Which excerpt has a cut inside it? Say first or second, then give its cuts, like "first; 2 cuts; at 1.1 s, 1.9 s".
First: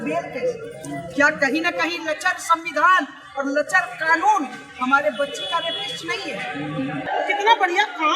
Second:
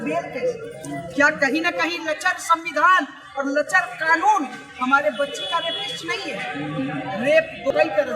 first; 1 cut; at 7.1 s